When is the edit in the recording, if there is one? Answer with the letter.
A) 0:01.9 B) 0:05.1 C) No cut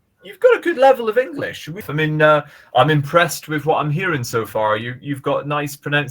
A